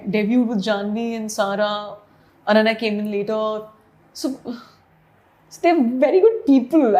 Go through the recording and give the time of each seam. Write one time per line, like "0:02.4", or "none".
none